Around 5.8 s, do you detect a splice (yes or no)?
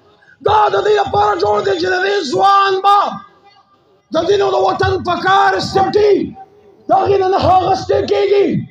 yes